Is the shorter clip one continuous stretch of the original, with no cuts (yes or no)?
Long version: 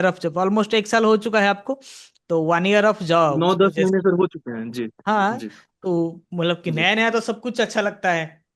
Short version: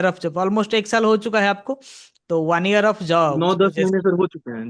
yes